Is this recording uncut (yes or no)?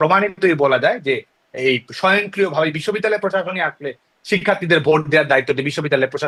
yes